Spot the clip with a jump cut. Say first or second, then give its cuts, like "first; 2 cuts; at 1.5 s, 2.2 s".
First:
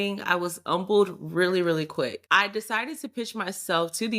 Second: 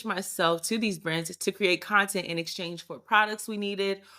first; 1 cut; at 2.2 s